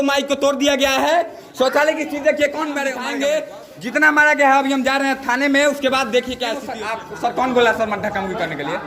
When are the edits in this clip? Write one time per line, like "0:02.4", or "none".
0:03.0
0:06.7